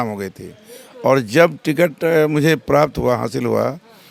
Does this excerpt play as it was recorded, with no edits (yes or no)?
yes